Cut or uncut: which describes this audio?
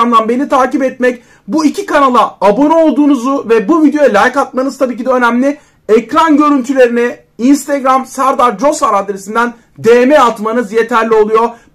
uncut